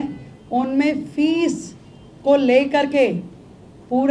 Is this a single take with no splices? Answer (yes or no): yes